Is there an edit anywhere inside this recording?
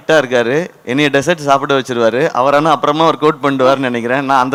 no; 0 cuts

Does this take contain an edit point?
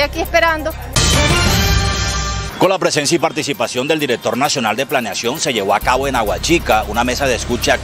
yes; 2 cuts; at 0.9 s, 2.4 s

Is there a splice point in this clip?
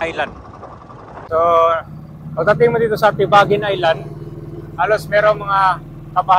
yes; 1 cut; at 1.3 s

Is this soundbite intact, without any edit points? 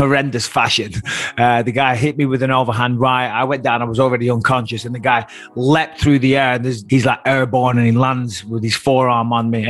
no; 1 cut; at 6.8 s

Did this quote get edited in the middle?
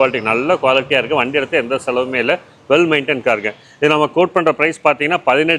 no; 0 cuts

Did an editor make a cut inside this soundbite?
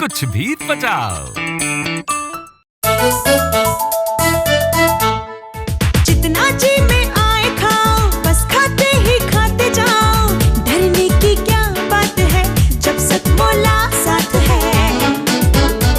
yes; 1 cut; at 2.7 s

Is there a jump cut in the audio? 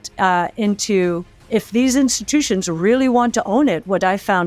yes; 1 cut; at 1.3 s

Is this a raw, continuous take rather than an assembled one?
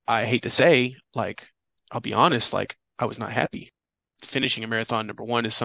no; 1 cut; at 3.7 s

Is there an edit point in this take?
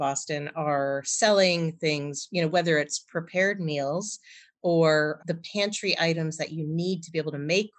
yes; 1 cut; at 5.2 s

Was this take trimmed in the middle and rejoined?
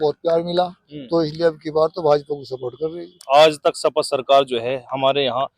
yes; 1 cut; at 3.2 s

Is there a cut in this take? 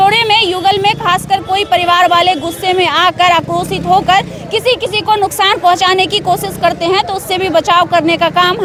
no; 0 cuts

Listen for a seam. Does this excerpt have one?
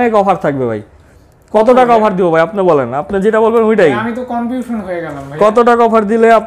no; 0 cuts

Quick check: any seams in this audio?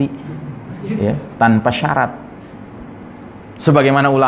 yes; 1 cut; at 2.8 s

